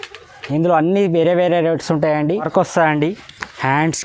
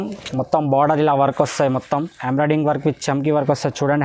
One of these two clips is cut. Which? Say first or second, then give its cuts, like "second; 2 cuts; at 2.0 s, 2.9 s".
first; 1 cut; at 2.5 s